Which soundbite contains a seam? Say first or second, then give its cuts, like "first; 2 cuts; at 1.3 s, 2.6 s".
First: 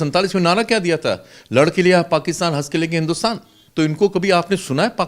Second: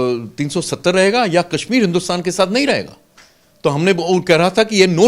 first; 1 cut; at 3.5 s